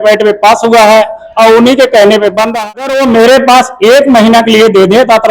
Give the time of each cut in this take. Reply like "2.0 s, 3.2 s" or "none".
2.5 s